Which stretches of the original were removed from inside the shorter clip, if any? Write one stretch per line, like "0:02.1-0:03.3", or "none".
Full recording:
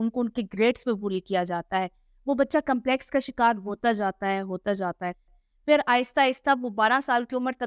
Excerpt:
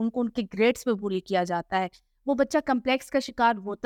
none